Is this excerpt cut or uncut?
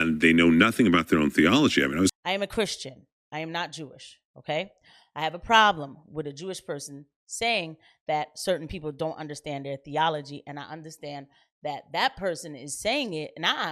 cut